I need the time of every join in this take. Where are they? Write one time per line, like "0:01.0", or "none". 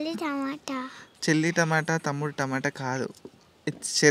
none